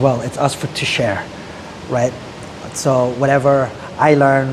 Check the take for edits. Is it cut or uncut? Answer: uncut